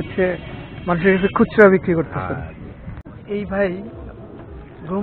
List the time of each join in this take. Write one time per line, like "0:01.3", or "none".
0:02.9